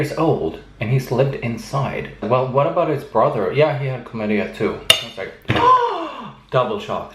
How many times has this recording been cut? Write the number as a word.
one